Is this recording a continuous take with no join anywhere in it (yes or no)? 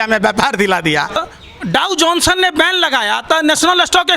no